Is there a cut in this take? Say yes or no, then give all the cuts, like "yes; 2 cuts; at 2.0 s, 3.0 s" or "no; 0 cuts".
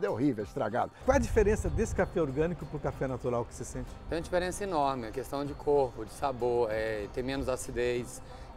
yes; 1 cut; at 0.9 s